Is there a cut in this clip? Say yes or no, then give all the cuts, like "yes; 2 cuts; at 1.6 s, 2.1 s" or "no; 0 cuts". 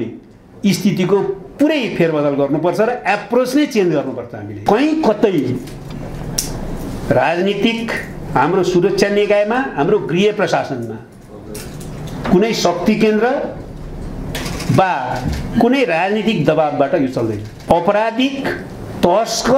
yes; 2 cuts; at 4.6 s, 17.5 s